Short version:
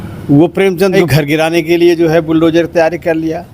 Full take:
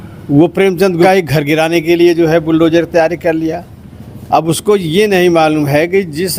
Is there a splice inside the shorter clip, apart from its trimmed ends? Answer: yes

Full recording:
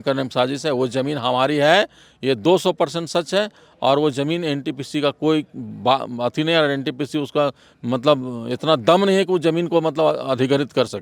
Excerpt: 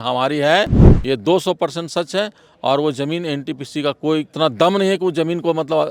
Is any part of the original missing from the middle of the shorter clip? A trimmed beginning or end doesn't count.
yes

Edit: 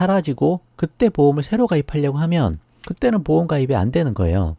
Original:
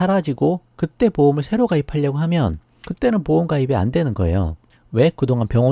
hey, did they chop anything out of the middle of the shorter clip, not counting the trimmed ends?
no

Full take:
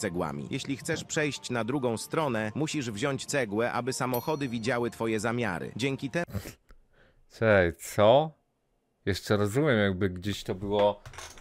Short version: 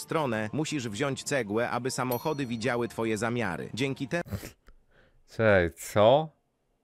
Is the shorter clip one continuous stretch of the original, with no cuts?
yes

